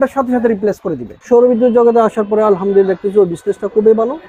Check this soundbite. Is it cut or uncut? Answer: cut